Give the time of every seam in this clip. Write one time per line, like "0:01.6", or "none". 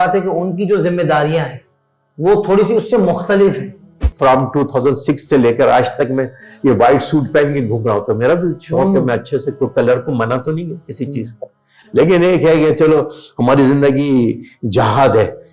0:04.1